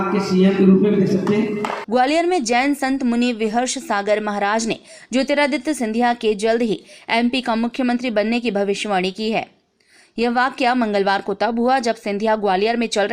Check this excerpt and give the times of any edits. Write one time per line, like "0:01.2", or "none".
0:01.8